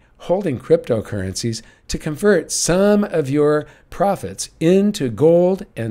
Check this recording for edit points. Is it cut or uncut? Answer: uncut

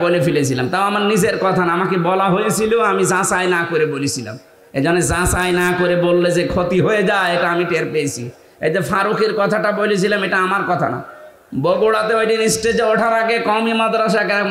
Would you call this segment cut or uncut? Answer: uncut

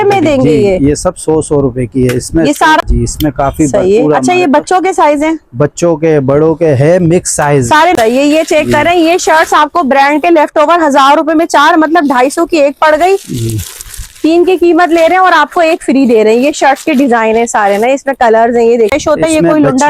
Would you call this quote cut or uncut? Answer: cut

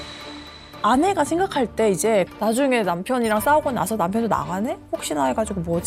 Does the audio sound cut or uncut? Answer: uncut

